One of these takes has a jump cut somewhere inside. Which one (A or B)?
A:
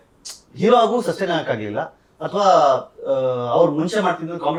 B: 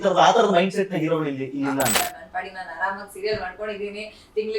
B